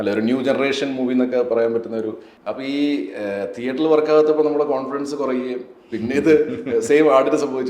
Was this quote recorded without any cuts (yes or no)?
no